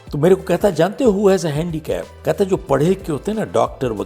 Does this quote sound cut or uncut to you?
cut